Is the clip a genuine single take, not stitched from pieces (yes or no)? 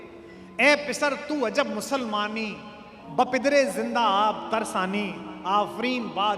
no